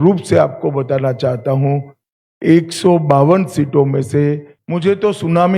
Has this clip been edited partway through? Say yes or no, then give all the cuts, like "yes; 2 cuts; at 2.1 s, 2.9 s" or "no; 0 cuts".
yes; 1 cut; at 4.6 s